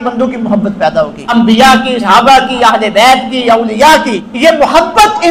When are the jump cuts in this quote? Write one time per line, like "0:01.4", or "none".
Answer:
0:01.2
0:02.0
0:04.2

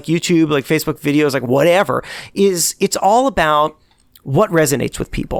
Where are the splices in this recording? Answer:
none

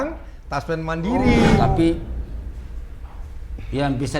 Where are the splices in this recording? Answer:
0:01.7

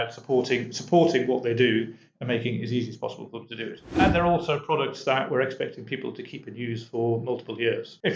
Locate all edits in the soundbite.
0:03.8

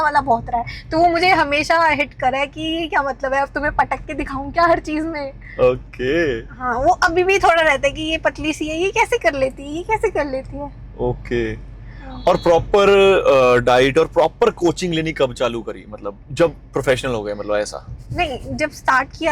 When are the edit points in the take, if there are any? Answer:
none

